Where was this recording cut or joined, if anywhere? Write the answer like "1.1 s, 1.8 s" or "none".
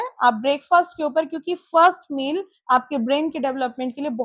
none